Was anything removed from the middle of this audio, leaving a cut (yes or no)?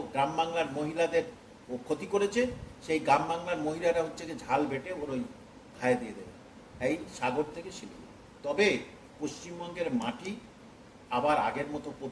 no